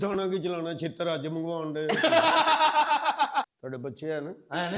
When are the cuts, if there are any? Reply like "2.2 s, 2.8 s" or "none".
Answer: 3.3 s